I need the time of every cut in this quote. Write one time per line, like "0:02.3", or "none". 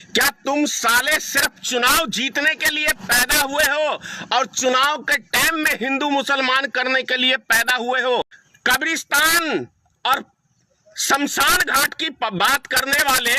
0:08.4

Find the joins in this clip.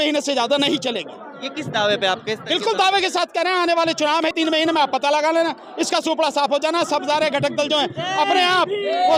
none

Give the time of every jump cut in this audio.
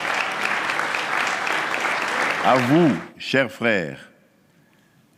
none

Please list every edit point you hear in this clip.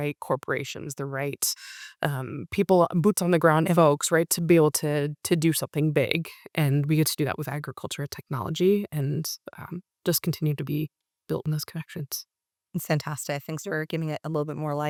none

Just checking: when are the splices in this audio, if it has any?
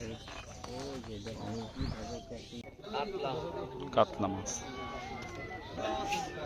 0:02.6

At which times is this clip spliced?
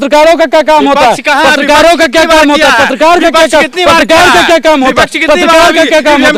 none

